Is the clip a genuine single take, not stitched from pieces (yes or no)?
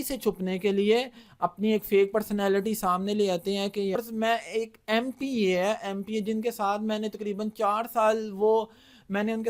no